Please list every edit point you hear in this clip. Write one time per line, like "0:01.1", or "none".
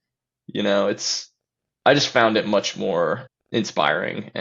0:03.3